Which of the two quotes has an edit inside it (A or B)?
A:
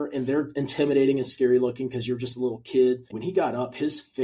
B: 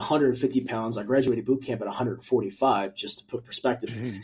A